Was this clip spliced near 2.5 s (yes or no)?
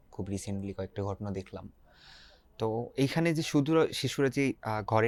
no